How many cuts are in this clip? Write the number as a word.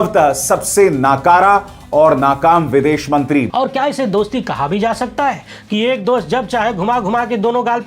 one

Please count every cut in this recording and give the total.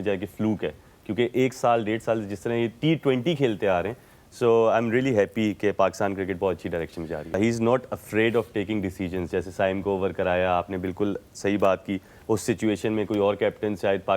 one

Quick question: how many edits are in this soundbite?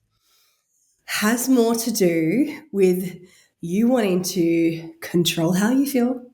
zero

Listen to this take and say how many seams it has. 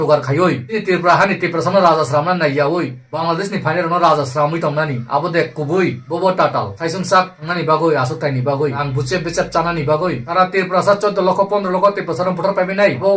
zero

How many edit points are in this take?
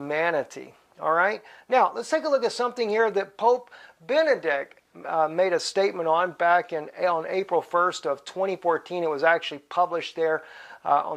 one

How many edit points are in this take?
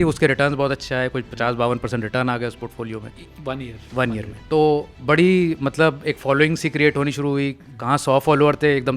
one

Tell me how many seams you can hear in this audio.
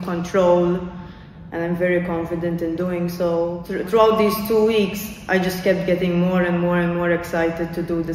one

